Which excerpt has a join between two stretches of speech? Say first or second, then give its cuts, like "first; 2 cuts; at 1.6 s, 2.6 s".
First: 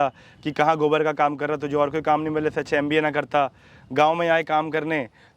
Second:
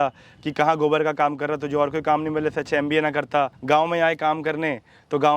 second; 1 cut; at 3.6 s